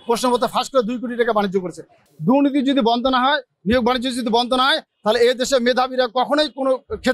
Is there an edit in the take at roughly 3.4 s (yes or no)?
no